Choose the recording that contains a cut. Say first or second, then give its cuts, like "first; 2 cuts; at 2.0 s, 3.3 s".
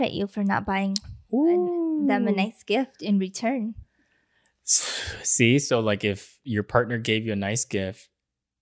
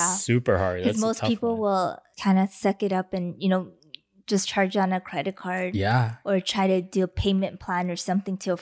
second; 1 cut; at 2.1 s